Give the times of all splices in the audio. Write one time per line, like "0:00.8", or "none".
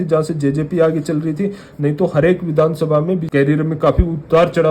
0:03.2